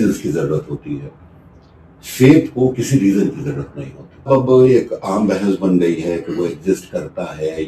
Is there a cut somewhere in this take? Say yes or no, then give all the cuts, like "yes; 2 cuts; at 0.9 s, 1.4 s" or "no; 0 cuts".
yes; 1 cut; at 4.3 s